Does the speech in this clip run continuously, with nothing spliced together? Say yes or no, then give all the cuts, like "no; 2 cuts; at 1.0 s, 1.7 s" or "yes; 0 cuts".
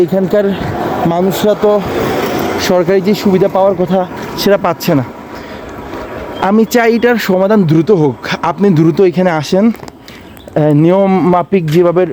yes; 0 cuts